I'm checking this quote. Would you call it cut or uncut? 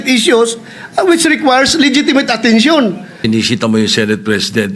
cut